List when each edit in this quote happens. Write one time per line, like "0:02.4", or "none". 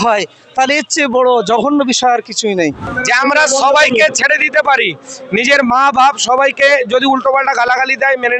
0:02.9